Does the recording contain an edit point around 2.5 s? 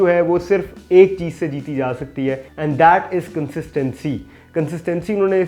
no; 0 cuts

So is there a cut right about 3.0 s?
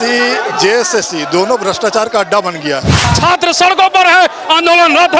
yes; 1 cut; at 3.0 s

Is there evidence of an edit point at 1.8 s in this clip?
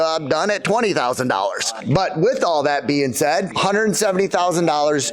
yes; 2 cuts; at 1.8 s, 3.5 s

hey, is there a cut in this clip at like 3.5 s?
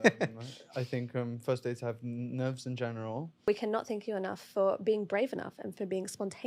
yes; 1 cut; at 3.5 s

